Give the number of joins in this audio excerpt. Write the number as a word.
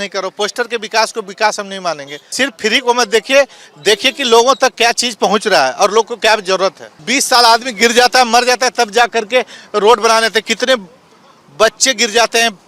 two